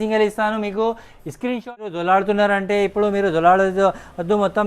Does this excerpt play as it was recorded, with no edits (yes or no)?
no